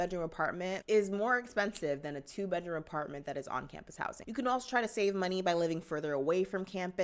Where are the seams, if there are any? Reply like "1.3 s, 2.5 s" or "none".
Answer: none